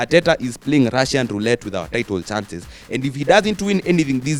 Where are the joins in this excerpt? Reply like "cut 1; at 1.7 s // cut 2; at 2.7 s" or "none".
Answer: none